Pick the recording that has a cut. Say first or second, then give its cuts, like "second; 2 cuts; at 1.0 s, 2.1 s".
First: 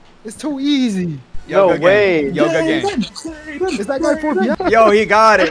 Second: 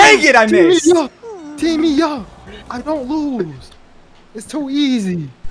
first; 1 cut; at 4.6 s